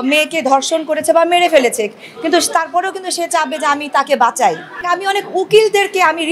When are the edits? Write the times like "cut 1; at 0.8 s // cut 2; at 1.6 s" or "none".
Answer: cut 1; at 4.8 s